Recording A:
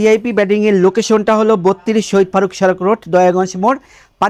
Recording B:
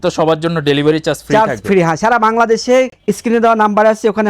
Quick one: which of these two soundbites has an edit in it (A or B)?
B